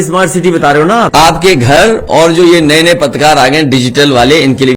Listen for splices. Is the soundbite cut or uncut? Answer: cut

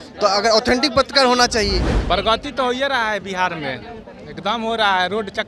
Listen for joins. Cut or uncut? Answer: cut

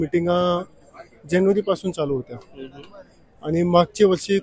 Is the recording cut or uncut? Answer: uncut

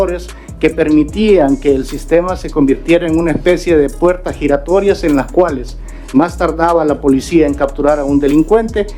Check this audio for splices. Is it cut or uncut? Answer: uncut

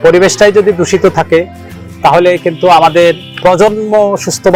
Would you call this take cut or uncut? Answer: uncut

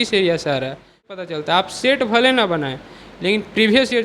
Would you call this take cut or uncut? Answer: cut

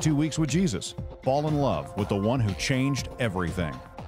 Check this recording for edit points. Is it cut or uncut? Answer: uncut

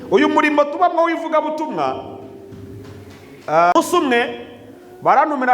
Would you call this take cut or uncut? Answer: cut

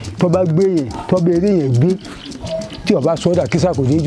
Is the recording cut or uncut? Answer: uncut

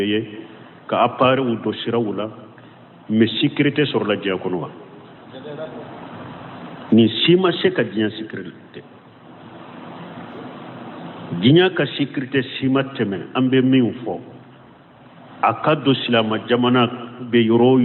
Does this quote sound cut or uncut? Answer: cut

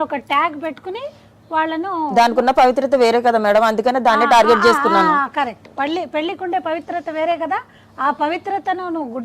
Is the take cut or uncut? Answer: uncut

